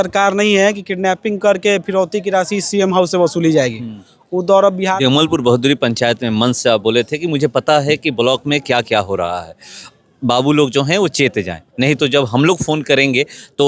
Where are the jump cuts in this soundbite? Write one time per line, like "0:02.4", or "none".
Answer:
0:05.0